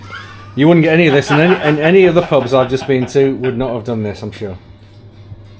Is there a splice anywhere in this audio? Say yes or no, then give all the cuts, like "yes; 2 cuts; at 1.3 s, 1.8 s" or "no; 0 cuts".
no; 0 cuts